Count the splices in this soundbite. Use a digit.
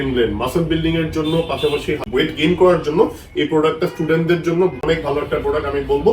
2